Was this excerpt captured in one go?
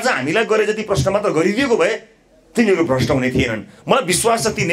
yes; 0 cuts

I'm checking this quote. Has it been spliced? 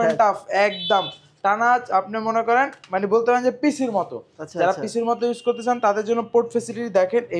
no; 0 cuts

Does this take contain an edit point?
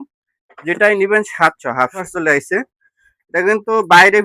yes; 1 cut; at 2.1 s

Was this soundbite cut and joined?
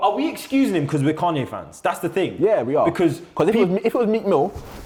no; 0 cuts

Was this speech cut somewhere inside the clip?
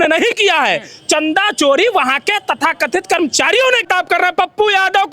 yes; 1 cut; at 3.8 s

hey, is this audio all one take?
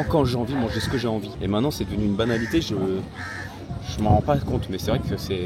yes; 0 cuts

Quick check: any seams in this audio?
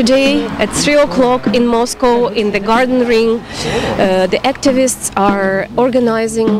no; 0 cuts

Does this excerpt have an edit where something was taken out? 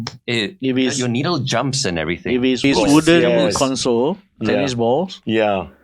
yes; 1 cut; at 2.6 s

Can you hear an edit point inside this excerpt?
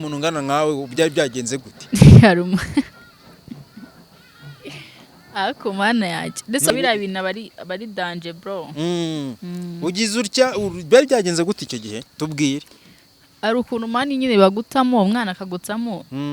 yes; 1 cut; at 6.7 s

